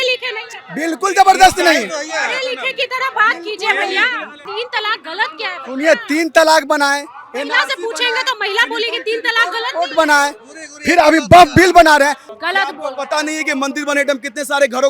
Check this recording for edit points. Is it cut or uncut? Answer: cut